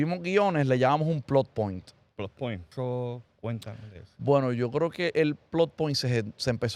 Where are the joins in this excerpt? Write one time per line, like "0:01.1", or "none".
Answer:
0:02.7